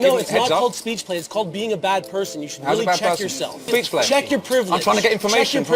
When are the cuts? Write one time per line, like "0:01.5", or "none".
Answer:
0:03.7